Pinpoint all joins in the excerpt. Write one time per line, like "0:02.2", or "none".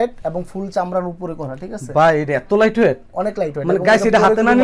none

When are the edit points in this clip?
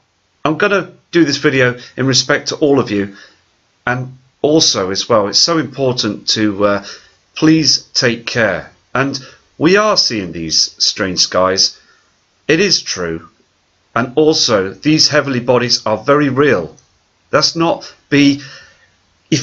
none

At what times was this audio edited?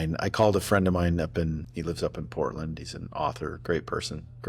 0:01.7
0:03.6

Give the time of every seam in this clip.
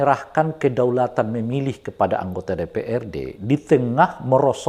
none

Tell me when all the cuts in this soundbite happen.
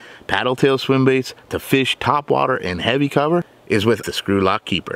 0:04.1

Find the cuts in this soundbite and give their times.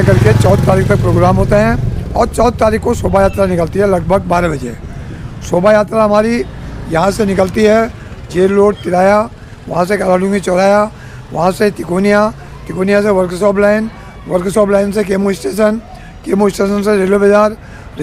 none

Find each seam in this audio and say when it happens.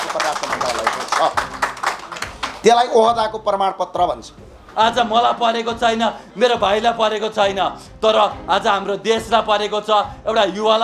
0:04.6

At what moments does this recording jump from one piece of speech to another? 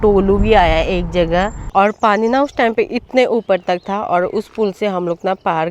0:01.7

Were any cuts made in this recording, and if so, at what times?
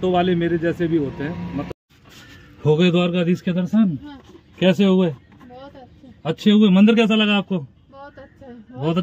0:01.7

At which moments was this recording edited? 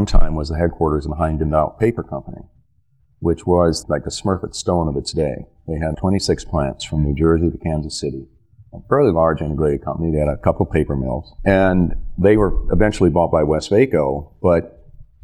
none

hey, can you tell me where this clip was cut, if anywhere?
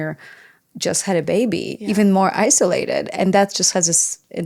none

